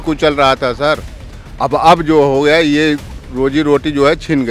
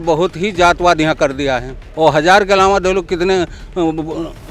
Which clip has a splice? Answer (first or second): second